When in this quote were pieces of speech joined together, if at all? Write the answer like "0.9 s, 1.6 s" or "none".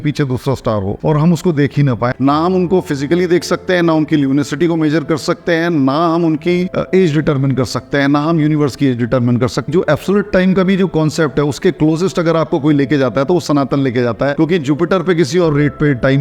2.1 s, 9.7 s, 14.3 s